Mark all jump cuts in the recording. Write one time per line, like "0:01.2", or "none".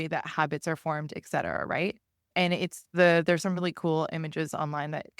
0:02.3